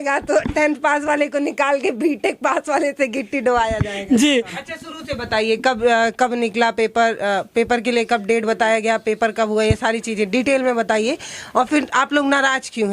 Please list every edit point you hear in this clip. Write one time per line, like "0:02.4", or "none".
0:04.6